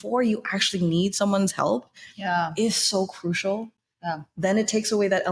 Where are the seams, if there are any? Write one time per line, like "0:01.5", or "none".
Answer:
none